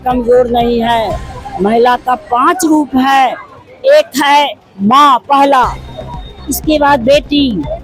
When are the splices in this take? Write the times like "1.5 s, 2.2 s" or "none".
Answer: none

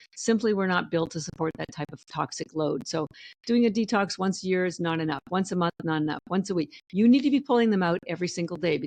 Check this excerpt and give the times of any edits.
none

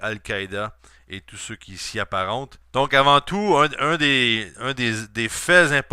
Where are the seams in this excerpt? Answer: 4.2 s

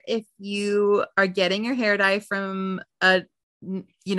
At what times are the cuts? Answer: none

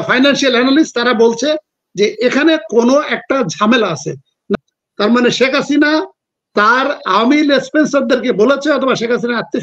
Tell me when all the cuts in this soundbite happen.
4.6 s

